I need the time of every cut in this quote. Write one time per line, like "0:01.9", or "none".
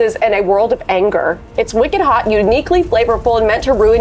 0:01.4